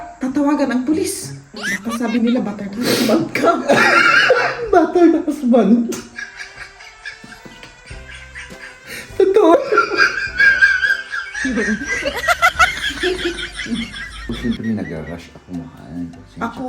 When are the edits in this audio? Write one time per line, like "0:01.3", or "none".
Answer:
0:14.3